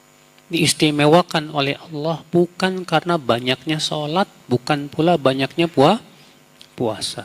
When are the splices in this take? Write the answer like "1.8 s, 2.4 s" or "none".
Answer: none